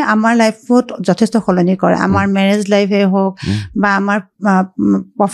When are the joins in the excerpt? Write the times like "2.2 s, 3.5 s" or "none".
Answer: none